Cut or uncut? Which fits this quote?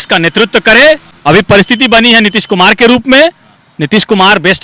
cut